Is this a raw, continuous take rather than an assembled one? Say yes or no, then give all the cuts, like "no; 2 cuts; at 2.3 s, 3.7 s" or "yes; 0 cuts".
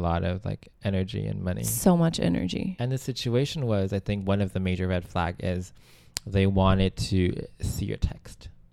no; 1 cut; at 2.7 s